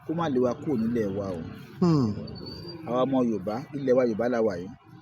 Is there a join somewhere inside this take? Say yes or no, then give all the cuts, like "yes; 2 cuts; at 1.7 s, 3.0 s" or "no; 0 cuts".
no; 0 cuts